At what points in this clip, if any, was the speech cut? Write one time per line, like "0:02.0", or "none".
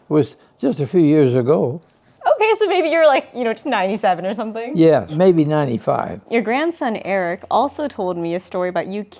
0:06.2